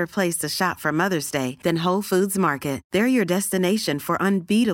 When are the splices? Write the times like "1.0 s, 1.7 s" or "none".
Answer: none